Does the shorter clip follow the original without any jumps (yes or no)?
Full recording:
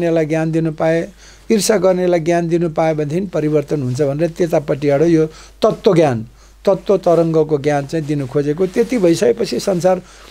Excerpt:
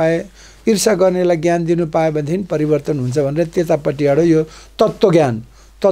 yes